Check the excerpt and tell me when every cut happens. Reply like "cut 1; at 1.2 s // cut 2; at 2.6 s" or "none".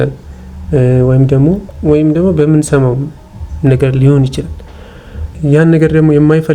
cut 1; at 1.7 s // cut 2; at 5.3 s